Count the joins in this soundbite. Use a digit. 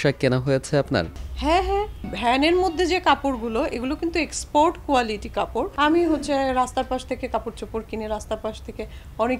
2